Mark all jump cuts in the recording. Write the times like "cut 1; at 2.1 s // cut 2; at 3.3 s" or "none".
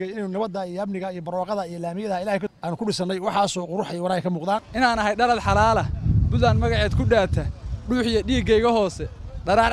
cut 1; at 2.5 s // cut 2; at 4.7 s